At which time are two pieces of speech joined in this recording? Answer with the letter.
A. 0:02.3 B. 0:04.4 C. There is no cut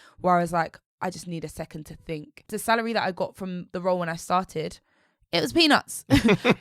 A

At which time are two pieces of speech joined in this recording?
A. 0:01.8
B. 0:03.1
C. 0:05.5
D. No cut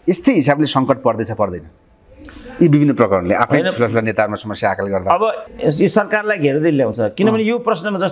C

